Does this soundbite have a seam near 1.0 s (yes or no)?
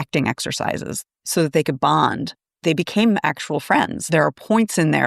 yes